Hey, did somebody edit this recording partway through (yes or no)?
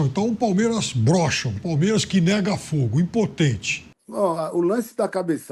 yes